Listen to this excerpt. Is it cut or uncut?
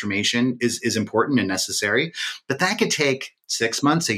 uncut